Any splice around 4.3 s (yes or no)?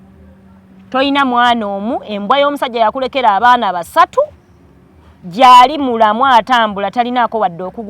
no